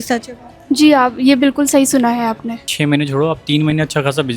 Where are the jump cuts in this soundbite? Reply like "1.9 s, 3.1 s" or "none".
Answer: 2.7 s